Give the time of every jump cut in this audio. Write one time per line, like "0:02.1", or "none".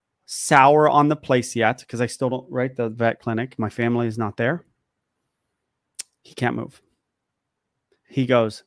0:03.6